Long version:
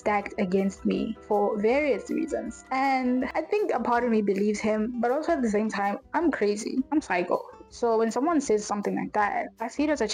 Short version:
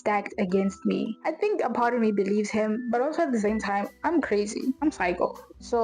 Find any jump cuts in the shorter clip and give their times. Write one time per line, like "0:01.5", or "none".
0:01.2